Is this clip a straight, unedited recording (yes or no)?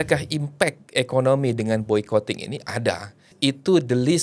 no